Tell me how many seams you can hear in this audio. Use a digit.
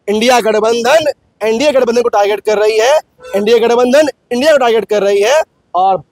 0